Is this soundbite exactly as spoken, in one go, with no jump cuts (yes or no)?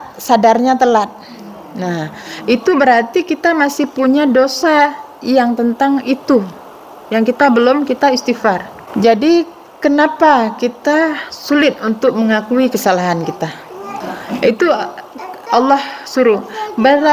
no